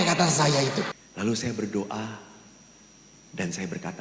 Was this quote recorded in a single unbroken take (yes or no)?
no